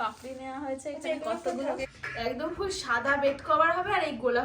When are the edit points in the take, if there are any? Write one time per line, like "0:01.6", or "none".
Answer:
0:01.9